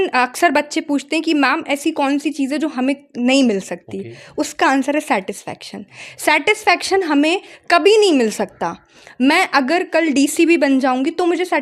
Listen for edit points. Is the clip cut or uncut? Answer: uncut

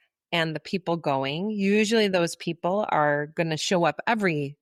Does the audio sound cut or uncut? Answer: uncut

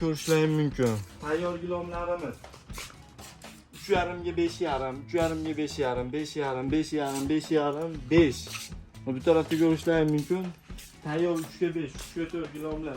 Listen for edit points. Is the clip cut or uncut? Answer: cut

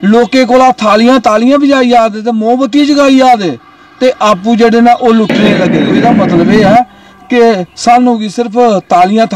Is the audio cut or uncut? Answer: cut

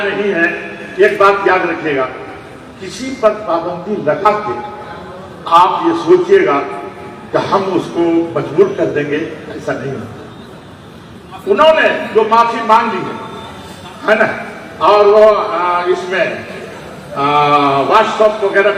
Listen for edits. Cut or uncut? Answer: uncut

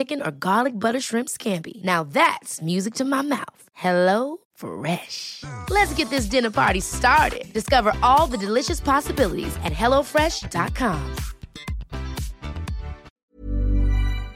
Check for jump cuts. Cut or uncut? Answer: cut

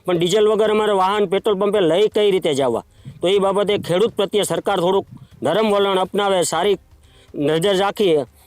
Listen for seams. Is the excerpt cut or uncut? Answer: uncut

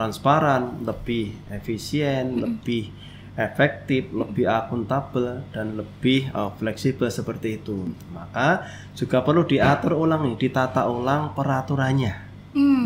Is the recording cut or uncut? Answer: uncut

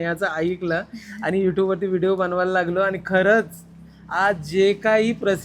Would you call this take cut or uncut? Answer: uncut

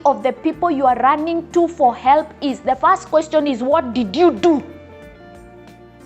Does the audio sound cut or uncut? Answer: cut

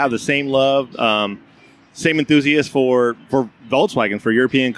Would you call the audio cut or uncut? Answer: uncut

